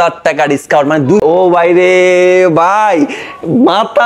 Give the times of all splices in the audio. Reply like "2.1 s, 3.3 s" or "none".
1.2 s